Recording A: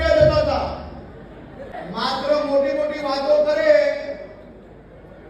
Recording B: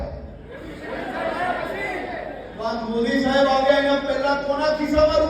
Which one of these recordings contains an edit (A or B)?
A